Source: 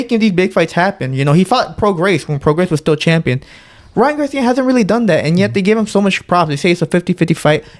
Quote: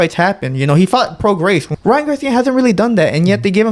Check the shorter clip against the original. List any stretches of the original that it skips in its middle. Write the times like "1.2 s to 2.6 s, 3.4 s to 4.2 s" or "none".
2.3 s to 3.8 s